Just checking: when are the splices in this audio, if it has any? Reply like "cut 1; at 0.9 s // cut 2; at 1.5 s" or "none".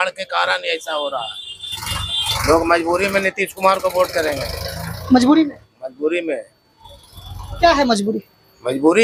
none

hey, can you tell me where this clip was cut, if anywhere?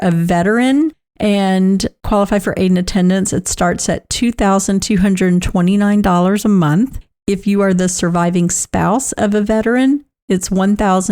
cut 1; at 1.0 s

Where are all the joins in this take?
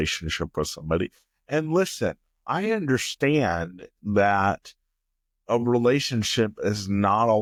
none

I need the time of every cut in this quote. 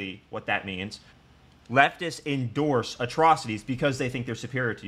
none

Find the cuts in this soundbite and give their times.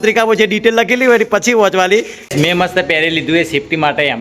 cut 1; at 2.2 s

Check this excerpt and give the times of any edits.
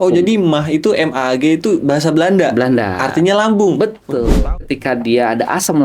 cut 1; at 4.4 s

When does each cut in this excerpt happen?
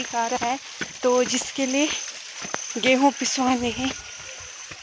none

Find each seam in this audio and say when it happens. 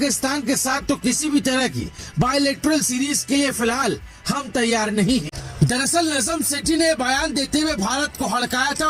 cut 1; at 5.4 s

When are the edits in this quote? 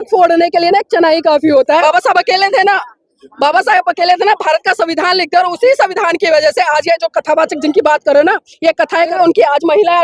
cut 1; at 1.8 s // cut 2; at 9.1 s

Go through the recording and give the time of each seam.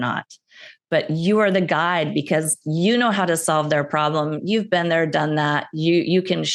none

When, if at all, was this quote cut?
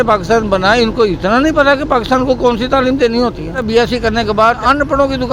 cut 1; at 3.6 s // cut 2; at 4.6 s

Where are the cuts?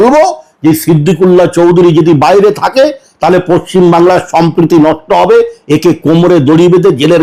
none

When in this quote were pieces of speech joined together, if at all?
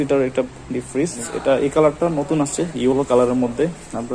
cut 1; at 1.2 s

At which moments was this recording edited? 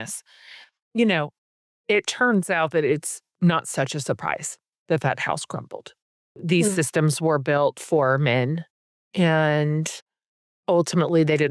cut 1; at 6.3 s

